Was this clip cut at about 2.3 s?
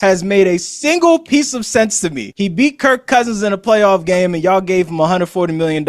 yes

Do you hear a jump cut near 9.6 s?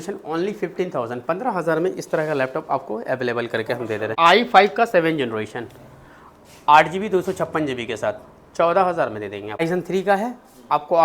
yes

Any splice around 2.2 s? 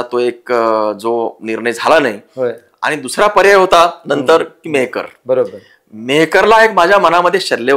no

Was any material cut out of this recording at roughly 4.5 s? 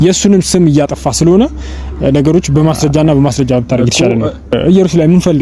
yes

